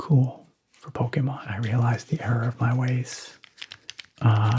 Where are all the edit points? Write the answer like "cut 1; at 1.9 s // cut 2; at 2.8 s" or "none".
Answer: cut 1; at 1.6 s